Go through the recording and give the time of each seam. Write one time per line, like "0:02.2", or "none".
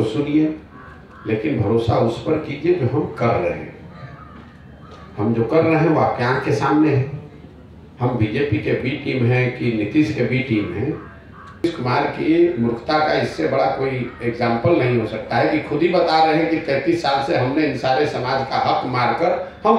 0:11.6